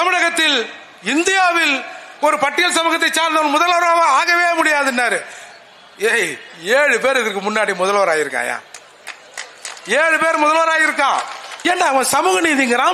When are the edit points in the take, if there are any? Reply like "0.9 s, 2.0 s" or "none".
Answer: 11.5 s